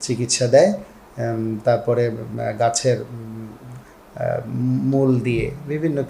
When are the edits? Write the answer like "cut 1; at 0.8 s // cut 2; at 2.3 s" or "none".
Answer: none